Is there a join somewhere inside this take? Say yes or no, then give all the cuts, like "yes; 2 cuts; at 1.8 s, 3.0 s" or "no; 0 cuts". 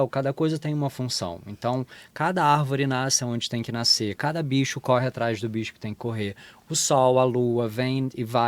no; 0 cuts